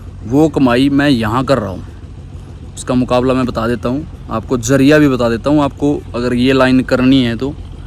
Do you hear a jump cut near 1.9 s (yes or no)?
no